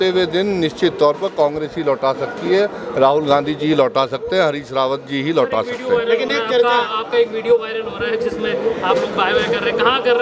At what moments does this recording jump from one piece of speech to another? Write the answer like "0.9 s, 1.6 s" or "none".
none